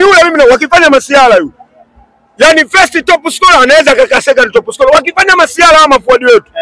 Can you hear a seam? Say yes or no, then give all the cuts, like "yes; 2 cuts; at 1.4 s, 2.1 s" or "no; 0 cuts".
no; 0 cuts